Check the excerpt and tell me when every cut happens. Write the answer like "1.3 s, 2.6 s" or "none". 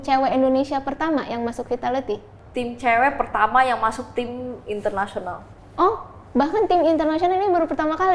2.4 s